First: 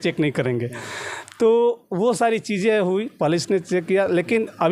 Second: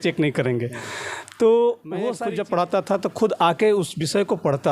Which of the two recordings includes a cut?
second; 1 cut; at 2.1 s

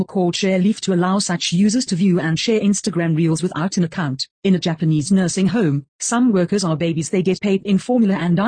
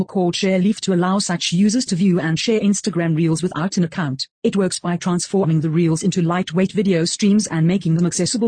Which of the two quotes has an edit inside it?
first; 2 cuts; at 4.4 s, 7.0 s

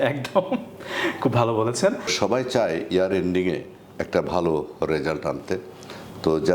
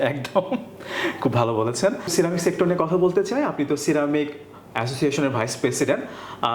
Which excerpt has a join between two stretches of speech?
first; 1 cut; at 2.1 s

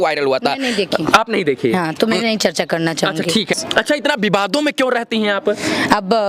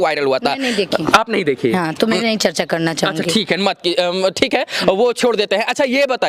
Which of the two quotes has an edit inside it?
first; 1 cut; at 3.6 s

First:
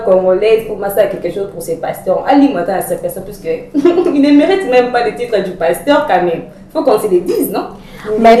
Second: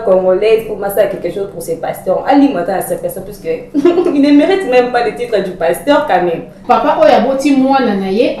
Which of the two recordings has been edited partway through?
second; 1 cut; at 6.6 s

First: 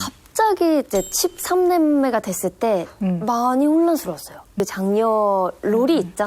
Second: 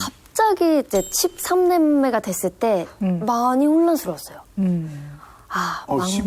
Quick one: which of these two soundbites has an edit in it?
first; 1 cut; at 4.6 s

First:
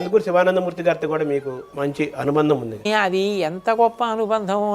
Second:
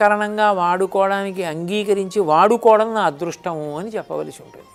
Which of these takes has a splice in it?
first; 2 cuts; at 1.6 s, 2.9 s

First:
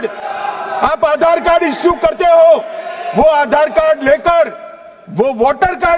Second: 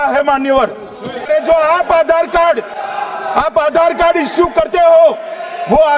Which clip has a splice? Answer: second; 1 cut; at 1.3 s

